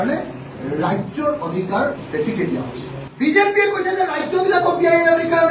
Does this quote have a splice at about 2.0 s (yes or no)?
yes